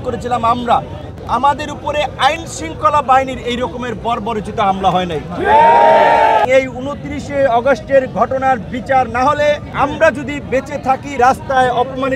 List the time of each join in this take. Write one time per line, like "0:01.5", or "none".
0:06.5
0:09.7